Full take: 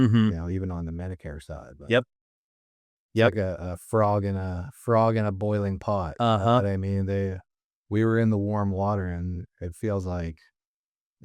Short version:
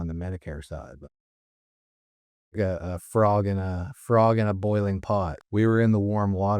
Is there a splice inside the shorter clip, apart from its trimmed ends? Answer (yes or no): yes